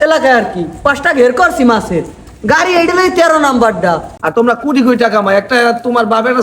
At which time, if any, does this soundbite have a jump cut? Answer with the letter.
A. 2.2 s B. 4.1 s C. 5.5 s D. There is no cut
B